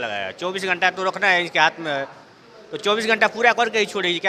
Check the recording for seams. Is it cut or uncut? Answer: uncut